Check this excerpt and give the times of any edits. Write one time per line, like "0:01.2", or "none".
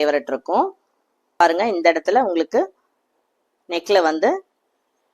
0:01.4